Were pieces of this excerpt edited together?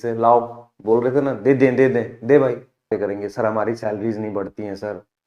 yes; 1 cut; at 2.9 s

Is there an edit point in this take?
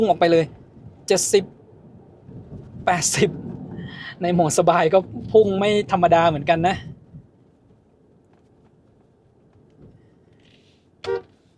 no; 0 cuts

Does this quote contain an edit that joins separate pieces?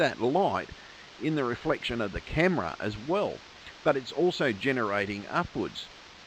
no; 0 cuts

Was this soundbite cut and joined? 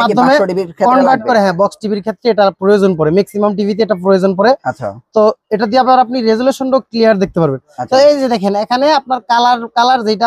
no; 0 cuts

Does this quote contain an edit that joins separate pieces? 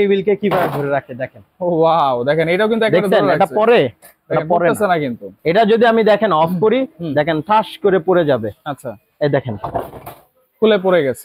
no; 0 cuts

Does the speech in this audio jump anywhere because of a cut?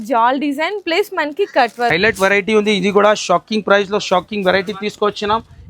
yes; 1 cut; at 1.9 s

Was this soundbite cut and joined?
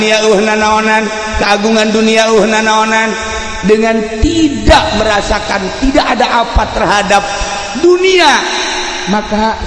no; 0 cuts

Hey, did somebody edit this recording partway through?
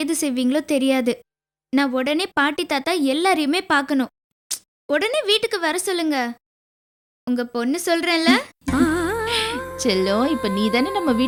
no; 0 cuts

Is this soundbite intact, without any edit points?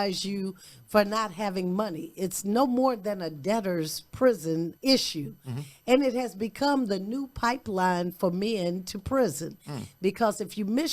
no; 1 cut; at 4.7 s

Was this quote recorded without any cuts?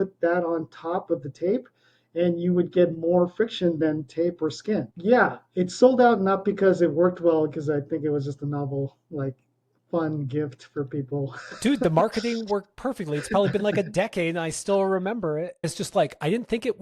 no; 2 cuts; at 4.9 s, 15.7 s

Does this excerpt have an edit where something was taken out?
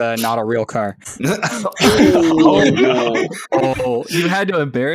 yes; 1 cut; at 1.0 s

